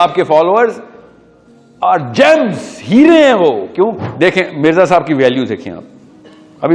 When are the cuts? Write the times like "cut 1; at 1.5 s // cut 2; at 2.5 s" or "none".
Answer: cut 1; at 4.0 s